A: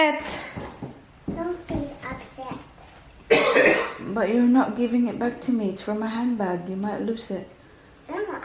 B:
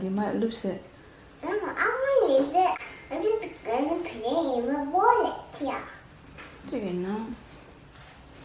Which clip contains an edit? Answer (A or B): B